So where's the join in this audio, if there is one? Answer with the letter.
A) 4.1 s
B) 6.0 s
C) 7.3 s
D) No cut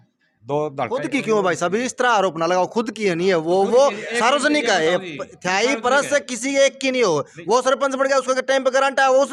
D